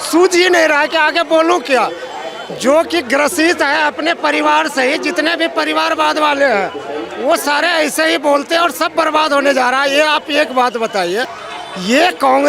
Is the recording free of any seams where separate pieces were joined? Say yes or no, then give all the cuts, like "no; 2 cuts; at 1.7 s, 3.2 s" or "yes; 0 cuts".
no; 1 cut; at 11.4 s